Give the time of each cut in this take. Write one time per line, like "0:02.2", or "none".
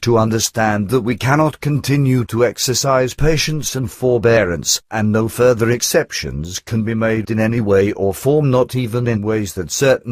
none